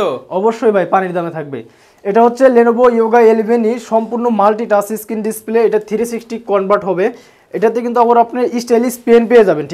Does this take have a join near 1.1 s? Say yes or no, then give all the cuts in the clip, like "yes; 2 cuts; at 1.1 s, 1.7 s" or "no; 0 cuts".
no; 0 cuts